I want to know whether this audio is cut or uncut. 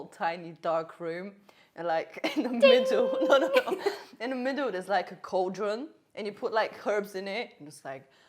uncut